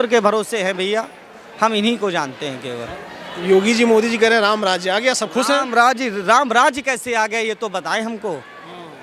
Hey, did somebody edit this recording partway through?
no; 0 cuts

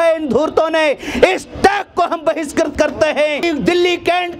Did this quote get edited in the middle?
yes; 1 cut; at 3.4 s

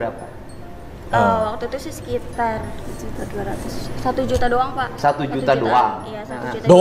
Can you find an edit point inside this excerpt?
no; 0 cuts

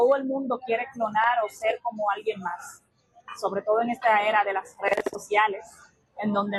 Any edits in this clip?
no; 0 cuts

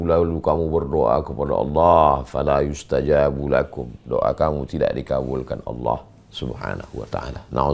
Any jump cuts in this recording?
no; 0 cuts

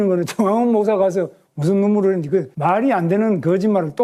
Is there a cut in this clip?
no; 0 cuts

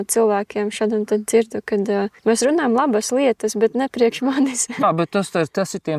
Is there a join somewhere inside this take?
yes; 1 cut; at 4.8 s

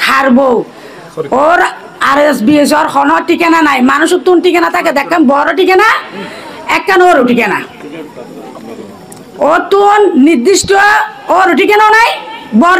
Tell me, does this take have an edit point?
no; 0 cuts

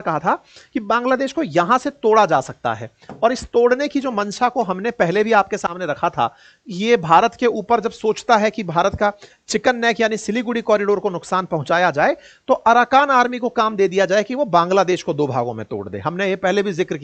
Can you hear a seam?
no; 0 cuts

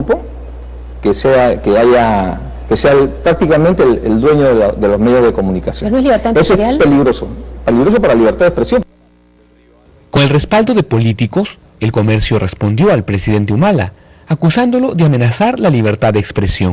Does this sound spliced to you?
yes; 1 cut; at 13.9 s

